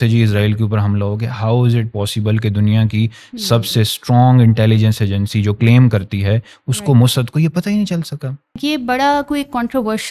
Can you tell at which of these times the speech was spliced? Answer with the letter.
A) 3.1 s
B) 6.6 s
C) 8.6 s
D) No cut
C